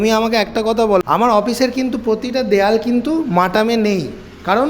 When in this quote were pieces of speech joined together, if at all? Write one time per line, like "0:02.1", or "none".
0:01.0